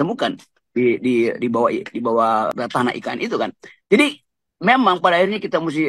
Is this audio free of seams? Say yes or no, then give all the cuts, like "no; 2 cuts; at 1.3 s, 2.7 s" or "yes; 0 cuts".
yes; 0 cuts